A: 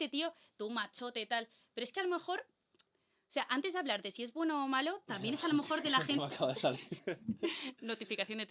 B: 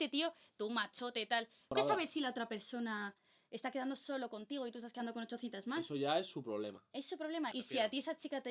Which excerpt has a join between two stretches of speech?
B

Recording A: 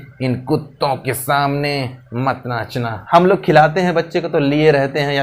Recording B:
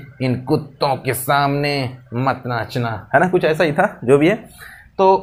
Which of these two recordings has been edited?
A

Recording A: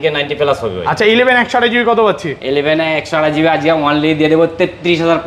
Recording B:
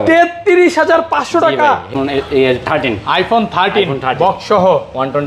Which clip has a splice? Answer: B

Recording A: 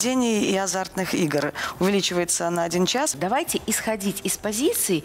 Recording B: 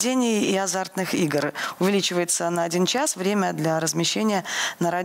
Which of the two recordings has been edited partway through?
A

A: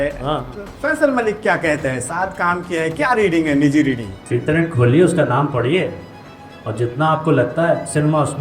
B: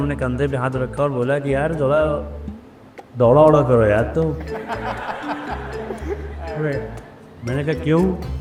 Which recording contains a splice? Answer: A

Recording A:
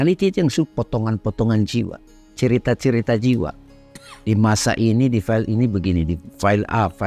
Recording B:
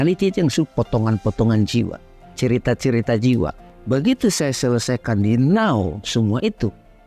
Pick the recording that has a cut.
B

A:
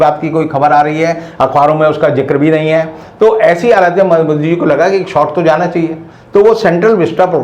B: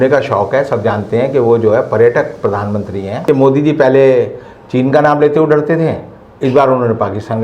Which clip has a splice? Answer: B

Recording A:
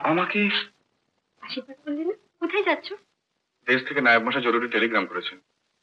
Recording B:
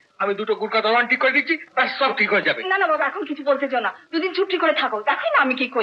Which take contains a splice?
A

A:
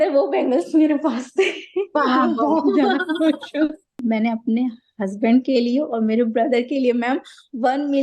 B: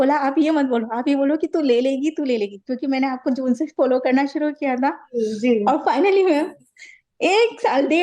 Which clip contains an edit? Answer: A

